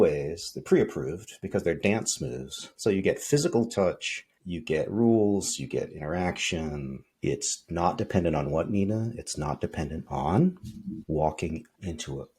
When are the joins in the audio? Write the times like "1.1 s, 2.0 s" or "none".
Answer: none

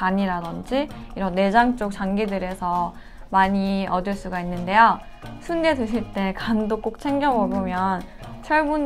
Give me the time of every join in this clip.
none

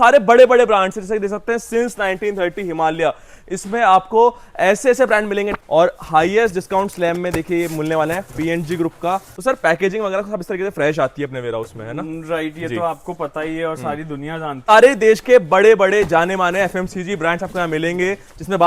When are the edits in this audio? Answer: 5.6 s, 9.3 s, 14.7 s

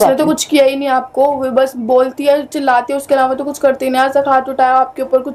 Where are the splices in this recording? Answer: none

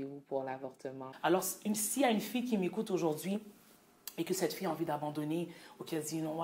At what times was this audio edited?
1.1 s

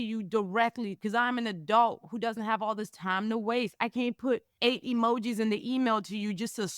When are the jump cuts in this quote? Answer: 4.5 s

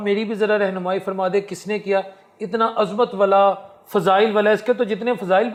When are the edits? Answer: none

